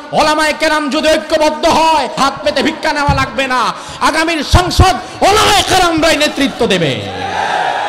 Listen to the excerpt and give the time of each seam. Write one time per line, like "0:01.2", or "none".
0:02.2

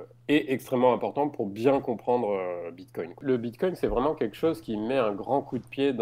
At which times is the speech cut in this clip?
0:03.2

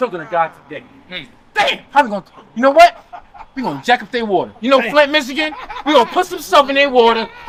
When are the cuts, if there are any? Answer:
none

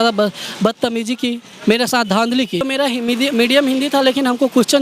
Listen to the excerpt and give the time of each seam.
0:02.6

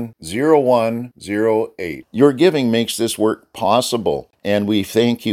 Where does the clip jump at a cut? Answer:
0:04.3

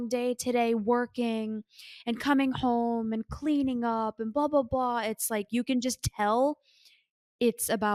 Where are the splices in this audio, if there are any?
none

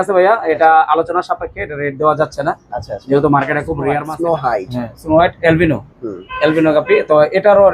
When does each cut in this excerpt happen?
0:04.0

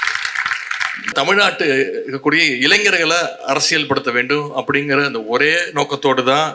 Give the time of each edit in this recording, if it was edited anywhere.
0:01.1

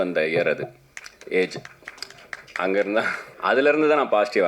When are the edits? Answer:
0:03.2

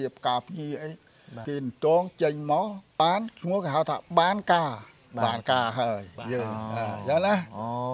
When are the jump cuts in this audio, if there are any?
0:01.4
0:03.0

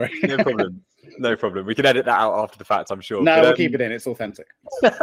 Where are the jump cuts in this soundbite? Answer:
none

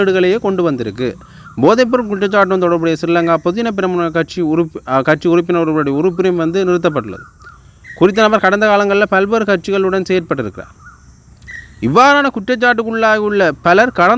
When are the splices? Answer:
none

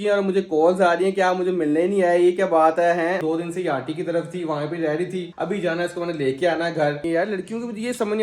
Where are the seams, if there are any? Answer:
0:03.2
0:07.0

